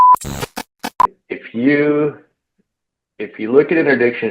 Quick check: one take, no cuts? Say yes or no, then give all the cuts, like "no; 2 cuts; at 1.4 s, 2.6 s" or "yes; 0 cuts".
no; 1 cut; at 1.1 s